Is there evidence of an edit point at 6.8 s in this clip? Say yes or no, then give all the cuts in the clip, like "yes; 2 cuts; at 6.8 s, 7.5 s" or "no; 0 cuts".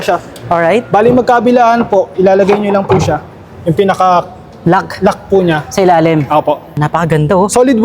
yes; 1 cut; at 6.8 s